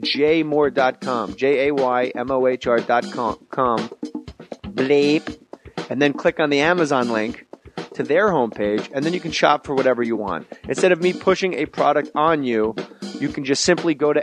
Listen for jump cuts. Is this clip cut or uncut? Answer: cut